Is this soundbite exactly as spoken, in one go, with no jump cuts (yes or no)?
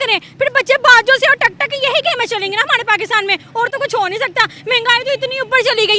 yes